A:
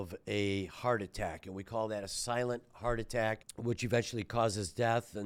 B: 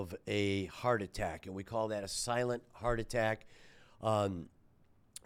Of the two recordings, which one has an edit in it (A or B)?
A